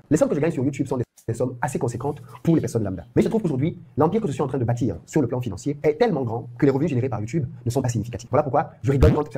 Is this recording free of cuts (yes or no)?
yes